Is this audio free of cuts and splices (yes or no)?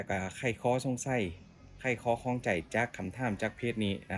yes